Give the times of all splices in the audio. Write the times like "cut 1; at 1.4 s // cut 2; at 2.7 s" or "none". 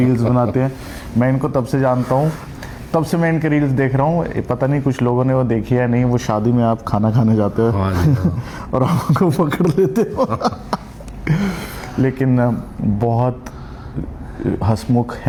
none

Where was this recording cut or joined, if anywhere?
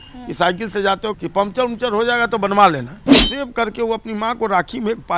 cut 1; at 1.2 s // cut 2; at 3.1 s

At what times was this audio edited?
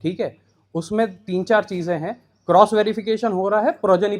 none

